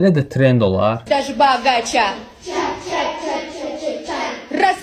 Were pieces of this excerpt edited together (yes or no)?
yes